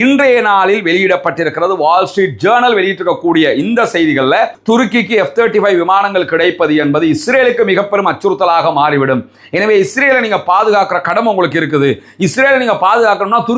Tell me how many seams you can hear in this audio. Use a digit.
1